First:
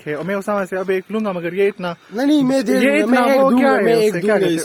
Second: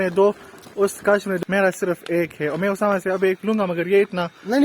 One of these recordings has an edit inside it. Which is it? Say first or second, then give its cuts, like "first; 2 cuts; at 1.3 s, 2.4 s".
second; 1 cut; at 1.4 s